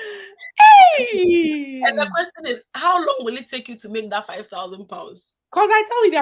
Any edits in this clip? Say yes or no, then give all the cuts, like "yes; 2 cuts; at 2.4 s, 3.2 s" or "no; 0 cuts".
no; 0 cuts